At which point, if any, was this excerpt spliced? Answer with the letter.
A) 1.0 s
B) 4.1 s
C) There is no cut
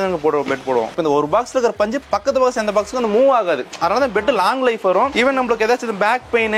A